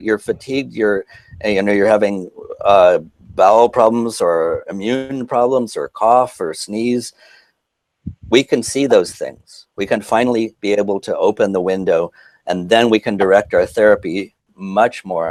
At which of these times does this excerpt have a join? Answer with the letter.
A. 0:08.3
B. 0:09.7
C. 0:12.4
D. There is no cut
D